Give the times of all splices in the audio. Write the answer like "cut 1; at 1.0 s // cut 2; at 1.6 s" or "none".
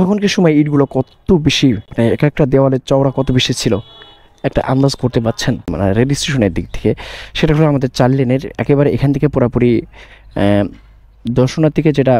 cut 1; at 5.7 s